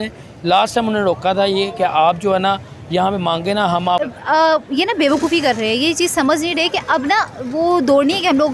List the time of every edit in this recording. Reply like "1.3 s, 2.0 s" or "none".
4.0 s